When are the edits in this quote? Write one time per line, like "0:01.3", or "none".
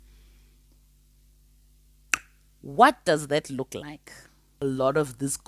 0:04.5

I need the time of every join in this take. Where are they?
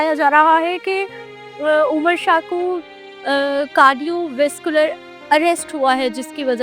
none

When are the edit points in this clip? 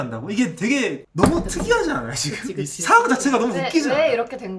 none

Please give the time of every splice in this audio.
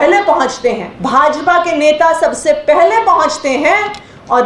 0:00.9

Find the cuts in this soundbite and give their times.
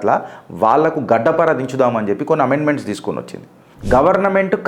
0:03.7

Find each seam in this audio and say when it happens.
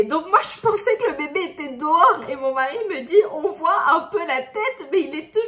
none

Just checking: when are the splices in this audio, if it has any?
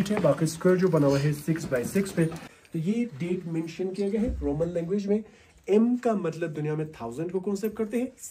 0:02.5

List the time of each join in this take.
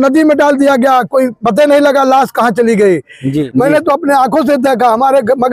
0:03.4

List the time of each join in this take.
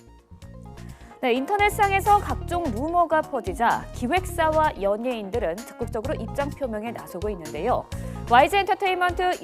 0:05.4

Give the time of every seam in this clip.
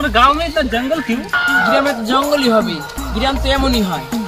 none

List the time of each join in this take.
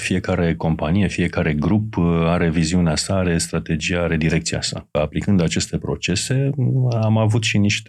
0:04.9

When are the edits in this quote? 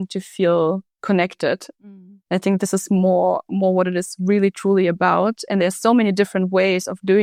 none

